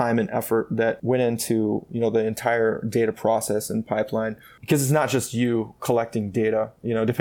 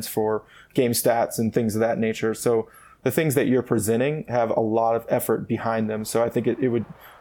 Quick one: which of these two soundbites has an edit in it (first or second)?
first